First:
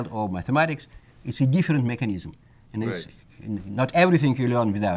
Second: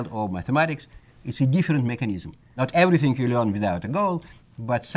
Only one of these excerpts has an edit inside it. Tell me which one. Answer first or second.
second